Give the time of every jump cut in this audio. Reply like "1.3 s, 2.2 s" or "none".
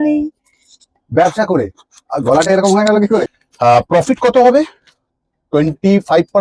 3.4 s